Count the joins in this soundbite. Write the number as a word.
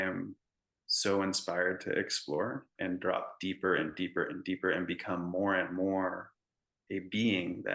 one